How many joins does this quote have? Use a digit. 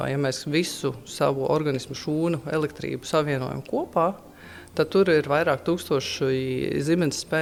0